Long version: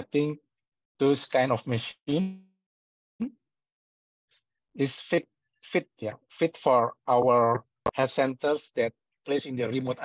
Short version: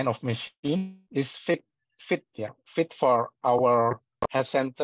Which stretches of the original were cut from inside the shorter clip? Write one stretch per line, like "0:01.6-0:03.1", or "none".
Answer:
0:02.4-0:04.6